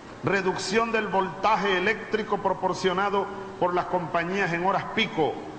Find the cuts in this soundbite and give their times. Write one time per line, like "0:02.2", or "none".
none